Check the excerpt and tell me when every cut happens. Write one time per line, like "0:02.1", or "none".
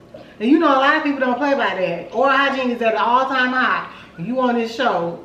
none